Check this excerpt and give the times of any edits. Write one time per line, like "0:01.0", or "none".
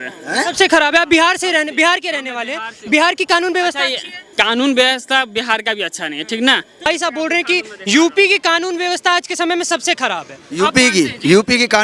0:06.9